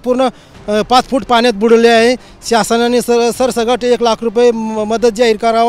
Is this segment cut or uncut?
uncut